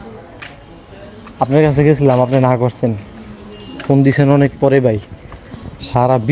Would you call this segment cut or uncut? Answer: uncut